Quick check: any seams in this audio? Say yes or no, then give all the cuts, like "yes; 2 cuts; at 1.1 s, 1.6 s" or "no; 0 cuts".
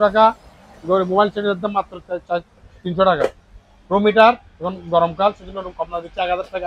no; 0 cuts